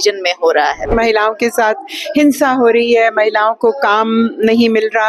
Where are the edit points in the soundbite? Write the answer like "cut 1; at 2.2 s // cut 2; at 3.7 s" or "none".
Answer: cut 1; at 0.9 s

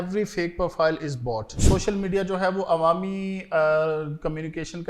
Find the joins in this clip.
cut 1; at 1.5 s

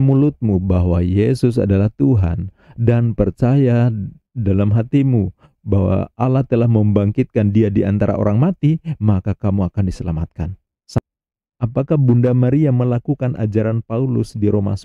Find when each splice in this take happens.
cut 1; at 11.0 s

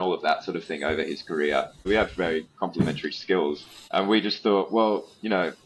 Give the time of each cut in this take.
cut 1; at 1.8 s // cut 2; at 3.7 s

